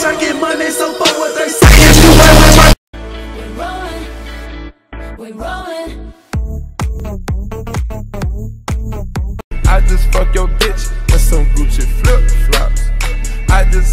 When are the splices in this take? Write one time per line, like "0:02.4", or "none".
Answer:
0:05.0